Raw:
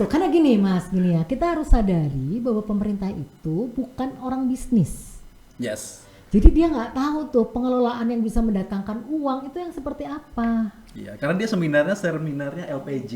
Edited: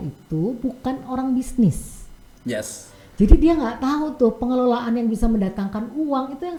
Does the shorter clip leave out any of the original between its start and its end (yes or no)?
no